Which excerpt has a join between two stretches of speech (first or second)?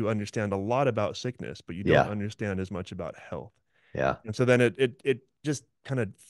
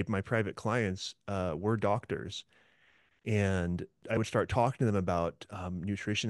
second